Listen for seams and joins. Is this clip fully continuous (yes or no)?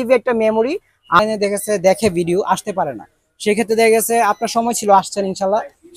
no